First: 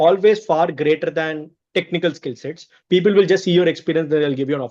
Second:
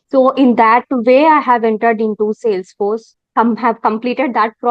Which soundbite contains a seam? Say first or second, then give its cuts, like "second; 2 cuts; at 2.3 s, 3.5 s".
second; 1 cut; at 3.2 s